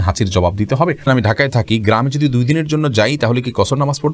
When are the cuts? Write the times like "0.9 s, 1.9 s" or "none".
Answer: 1.0 s